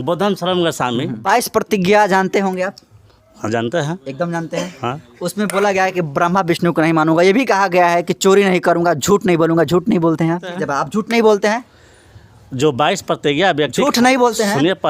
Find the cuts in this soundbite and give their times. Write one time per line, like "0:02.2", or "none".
0:01.2
0:10.6